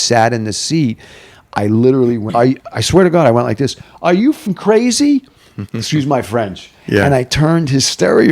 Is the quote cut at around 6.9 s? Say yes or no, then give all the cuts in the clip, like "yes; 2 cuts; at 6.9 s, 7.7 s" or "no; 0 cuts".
no; 2 cuts; at 2.3 s, 4.5 s